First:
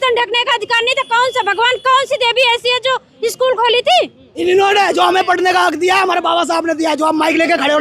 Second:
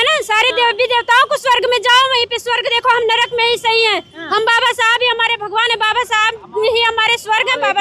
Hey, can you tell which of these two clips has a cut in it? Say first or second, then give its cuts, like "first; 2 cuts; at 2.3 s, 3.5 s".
first; 1 cut; at 4.4 s